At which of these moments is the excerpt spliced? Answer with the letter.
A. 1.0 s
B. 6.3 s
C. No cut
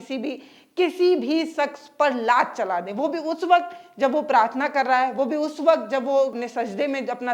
B